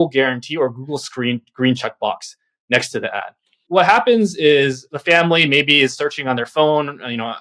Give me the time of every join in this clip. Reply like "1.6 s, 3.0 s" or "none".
3.5 s, 4.9 s